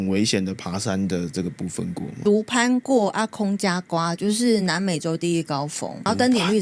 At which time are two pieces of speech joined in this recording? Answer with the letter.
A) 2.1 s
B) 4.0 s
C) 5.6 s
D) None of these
D